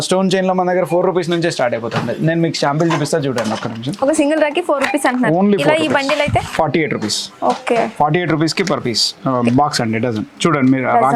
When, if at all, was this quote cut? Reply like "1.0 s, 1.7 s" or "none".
none